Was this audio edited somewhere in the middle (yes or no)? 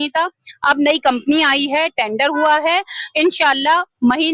no